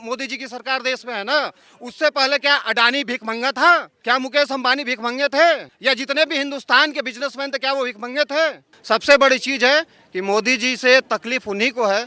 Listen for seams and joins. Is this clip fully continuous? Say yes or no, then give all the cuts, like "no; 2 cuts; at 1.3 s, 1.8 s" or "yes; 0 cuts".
no; 3 cuts; at 3.9 s, 5.7 s, 8.7 s